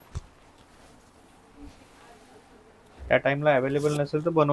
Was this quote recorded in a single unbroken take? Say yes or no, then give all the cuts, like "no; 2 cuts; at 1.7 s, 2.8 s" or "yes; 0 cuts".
yes; 0 cuts